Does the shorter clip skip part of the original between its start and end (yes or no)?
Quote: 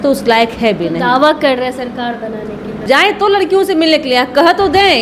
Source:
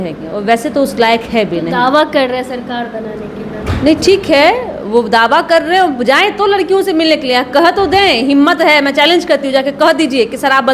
yes